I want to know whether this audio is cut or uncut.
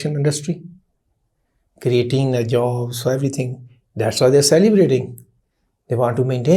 uncut